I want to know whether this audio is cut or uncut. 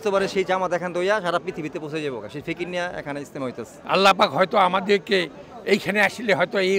uncut